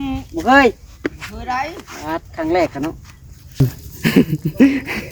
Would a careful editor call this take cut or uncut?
cut